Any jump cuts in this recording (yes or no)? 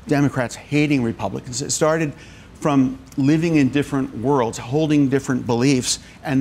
no